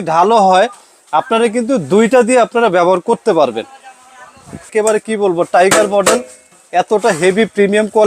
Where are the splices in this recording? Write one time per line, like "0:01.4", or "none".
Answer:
0:04.7